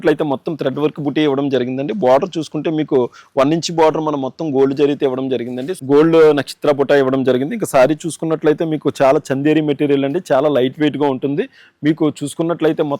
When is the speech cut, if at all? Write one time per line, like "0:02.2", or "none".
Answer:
0:05.7

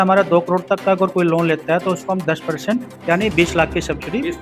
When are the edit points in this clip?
none

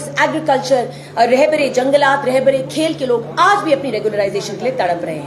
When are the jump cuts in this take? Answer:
0:02.2

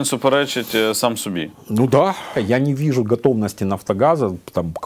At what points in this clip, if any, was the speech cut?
0:02.4

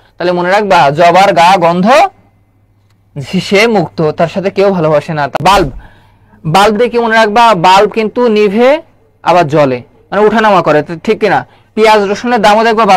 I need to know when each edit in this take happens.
0:05.4

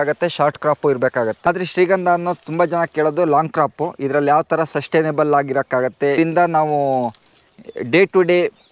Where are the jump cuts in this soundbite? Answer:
0:01.5
0:06.2

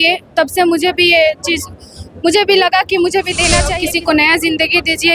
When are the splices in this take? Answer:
0:03.7

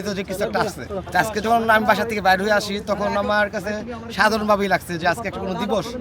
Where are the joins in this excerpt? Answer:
0:00.9

